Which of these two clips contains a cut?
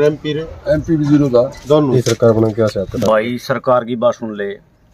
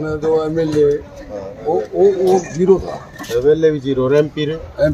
first; 1 cut; at 1.8 s

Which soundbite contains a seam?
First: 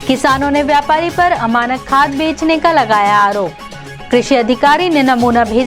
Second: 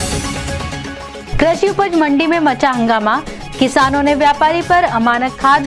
second; 1 cut; at 1.2 s

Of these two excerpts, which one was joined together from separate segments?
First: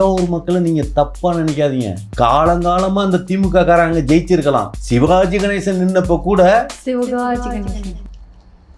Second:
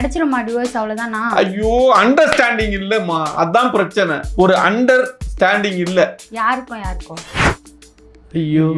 first; 2 cuts; at 2.0 s, 4.8 s

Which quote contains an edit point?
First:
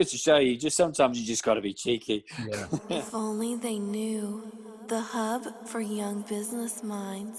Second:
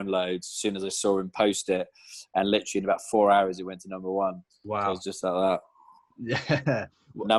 first; 1 cut; at 2.8 s

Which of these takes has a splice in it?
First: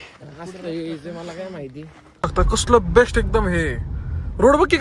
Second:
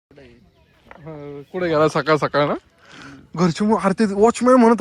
first; 1 cut; at 2.3 s

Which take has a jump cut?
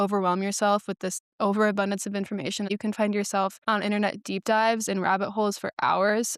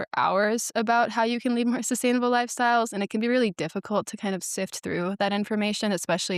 first; 2 cuts; at 1.1 s, 2.7 s

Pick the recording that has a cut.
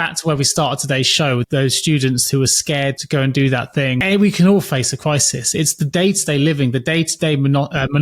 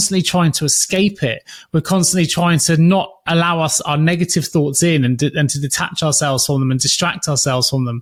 first; 3 cuts; at 1.4 s, 3.0 s, 4.0 s

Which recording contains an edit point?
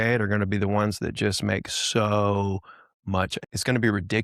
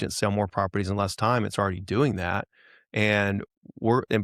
first; 1 cut; at 3.4 s

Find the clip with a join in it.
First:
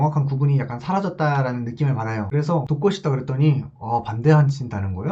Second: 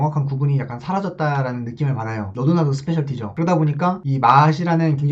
first; 1 cut; at 2.3 s

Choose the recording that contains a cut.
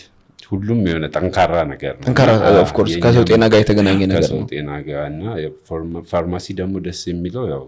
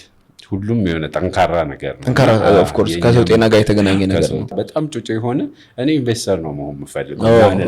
second; 1 cut; at 4.5 s

